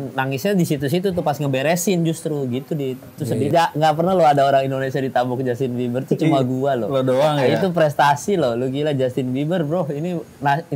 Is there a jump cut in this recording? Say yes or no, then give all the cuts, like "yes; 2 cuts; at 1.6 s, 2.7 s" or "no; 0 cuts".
yes; 1 cut; at 3.5 s